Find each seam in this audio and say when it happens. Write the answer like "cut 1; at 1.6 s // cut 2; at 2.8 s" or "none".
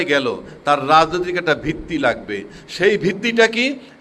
none

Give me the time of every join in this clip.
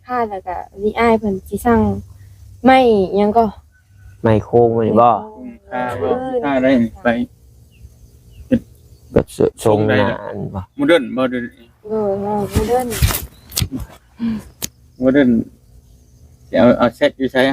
cut 1; at 6.4 s

